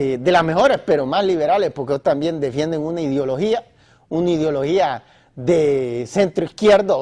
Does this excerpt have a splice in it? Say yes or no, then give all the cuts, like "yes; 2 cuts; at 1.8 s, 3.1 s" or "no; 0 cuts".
yes; 1 cut; at 3.0 s